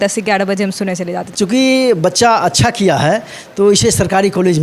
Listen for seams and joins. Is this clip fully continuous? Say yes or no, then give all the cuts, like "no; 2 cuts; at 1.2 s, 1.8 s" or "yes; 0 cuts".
no; 1 cut; at 1.3 s